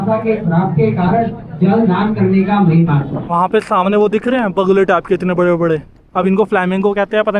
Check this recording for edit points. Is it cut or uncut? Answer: cut